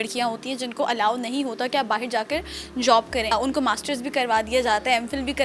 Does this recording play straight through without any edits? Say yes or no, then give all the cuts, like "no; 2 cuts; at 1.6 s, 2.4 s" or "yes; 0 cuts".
no; 1 cut; at 3.3 s